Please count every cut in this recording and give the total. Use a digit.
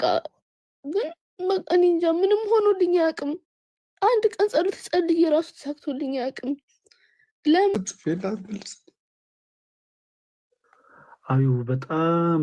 1